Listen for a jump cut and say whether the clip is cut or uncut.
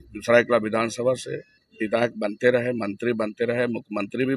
uncut